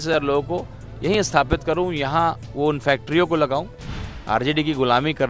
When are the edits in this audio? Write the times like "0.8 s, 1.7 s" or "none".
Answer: 4.1 s